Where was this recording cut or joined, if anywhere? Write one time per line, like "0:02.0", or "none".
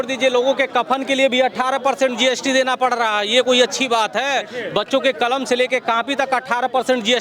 none